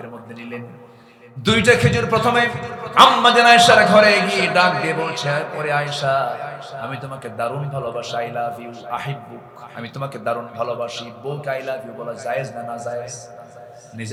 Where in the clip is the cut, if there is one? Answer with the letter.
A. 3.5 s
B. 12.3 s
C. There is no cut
C